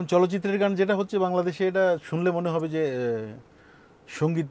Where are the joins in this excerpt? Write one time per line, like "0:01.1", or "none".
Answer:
none